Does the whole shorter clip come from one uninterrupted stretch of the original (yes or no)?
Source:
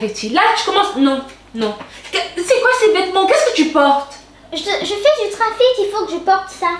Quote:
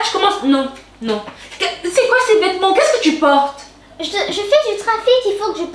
yes